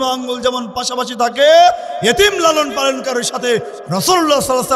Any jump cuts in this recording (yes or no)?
no